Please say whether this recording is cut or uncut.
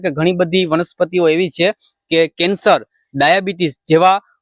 uncut